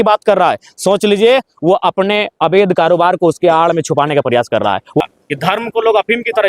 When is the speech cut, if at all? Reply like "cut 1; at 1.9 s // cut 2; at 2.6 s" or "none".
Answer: cut 1; at 5.0 s